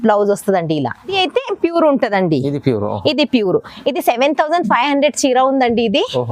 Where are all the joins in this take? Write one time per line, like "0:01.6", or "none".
0:01.2